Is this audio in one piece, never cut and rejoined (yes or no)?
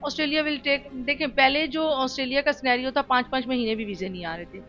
yes